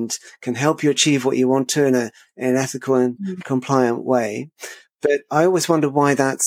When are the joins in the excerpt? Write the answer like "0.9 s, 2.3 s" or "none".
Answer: none